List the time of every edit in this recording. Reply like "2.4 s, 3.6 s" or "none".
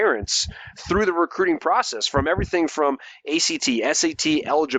none